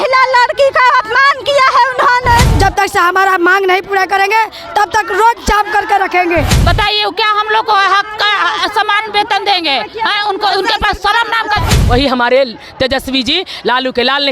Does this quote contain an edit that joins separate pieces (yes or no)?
yes